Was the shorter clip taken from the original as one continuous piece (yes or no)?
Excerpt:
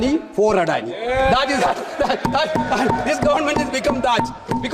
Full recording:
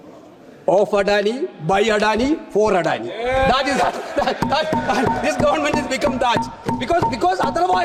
yes